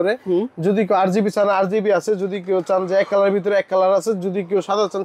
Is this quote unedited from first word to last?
yes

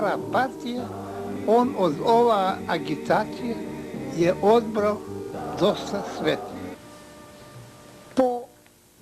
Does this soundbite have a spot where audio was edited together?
yes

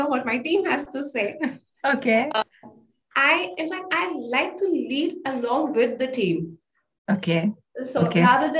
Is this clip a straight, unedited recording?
yes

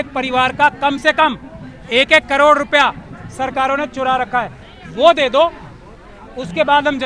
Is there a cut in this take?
no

